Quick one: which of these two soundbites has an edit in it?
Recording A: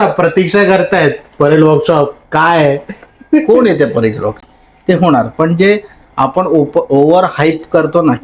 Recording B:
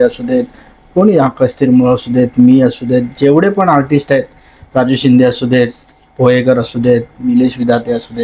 A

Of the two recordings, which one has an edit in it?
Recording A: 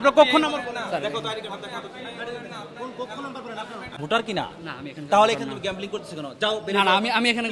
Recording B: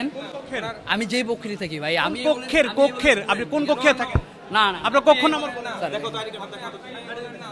A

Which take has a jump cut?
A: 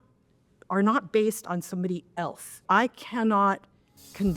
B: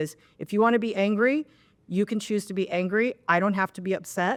A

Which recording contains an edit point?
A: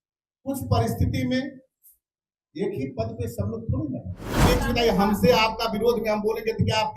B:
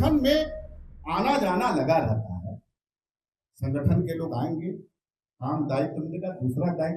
A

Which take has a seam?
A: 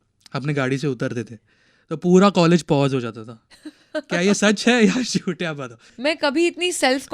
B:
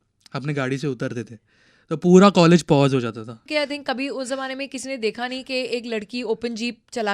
B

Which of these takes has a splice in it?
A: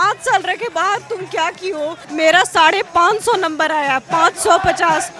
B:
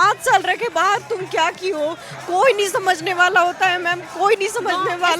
A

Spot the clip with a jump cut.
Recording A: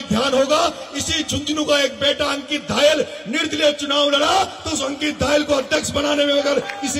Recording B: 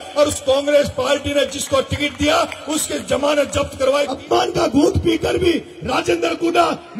B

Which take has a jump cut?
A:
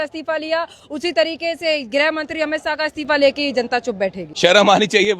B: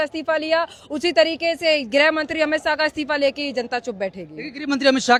A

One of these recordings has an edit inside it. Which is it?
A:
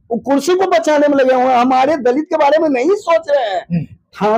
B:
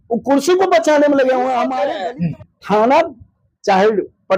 B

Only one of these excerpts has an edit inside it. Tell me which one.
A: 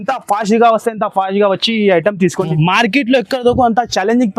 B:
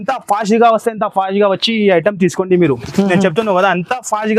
A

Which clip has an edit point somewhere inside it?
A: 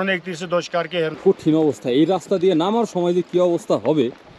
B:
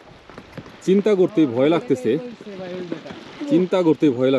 A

